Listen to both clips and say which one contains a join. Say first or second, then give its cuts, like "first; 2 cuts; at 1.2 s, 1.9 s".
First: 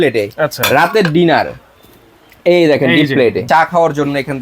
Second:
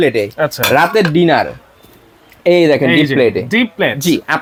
first; 1 cut; at 3.4 s